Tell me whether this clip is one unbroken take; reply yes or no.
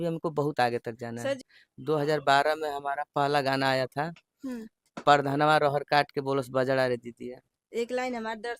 no